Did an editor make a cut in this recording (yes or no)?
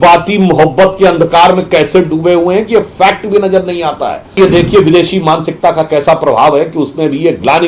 yes